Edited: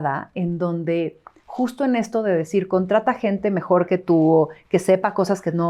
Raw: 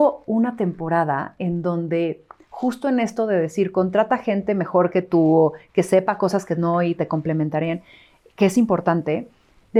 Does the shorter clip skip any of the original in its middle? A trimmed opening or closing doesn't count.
no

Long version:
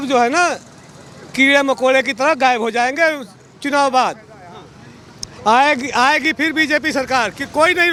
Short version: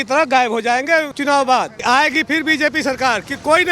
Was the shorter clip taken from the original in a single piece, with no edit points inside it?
no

